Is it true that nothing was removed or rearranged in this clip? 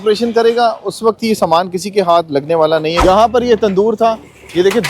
no; 1 cut; at 3.0 s

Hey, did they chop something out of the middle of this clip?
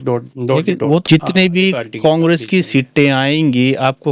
yes; 1 cut; at 1.0 s

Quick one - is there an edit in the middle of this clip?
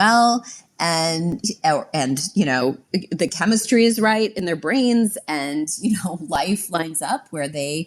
no; 0 cuts

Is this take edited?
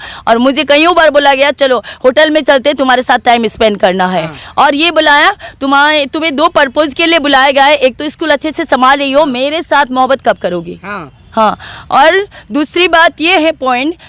no; 0 cuts

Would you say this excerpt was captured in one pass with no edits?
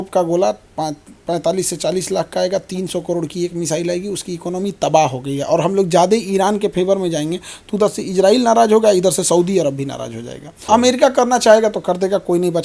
no; 1 cut; at 10.5 s

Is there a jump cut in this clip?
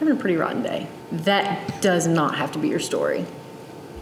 yes; 1 cut; at 0.9 s

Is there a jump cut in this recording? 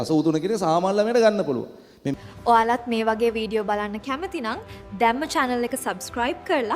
yes; 1 cut; at 2.0 s

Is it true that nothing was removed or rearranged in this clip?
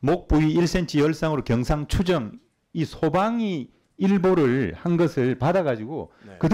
yes; 0 cuts

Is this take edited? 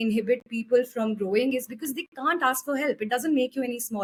no; 0 cuts

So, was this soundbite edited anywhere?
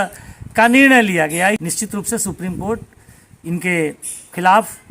yes; 1 cut; at 1.6 s

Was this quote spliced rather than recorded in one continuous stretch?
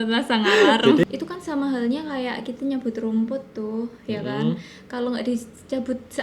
yes; 1 cut; at 1.0 s

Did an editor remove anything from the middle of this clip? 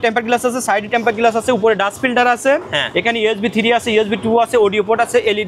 no; 0 cuts

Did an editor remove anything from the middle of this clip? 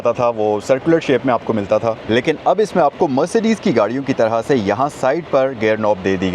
yes; 1 cut; at 2.0 s

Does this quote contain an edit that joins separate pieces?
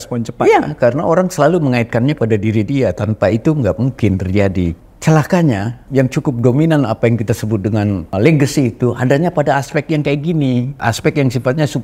yes; 4 cuts; at 4.8 s, 5.8 s, 8.1 s, 10.7 s

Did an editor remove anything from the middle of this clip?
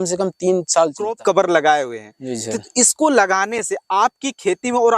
yes; 1 cut; at 1.2 s

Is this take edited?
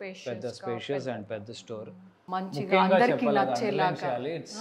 yes; 1 cut; at 2.2 s

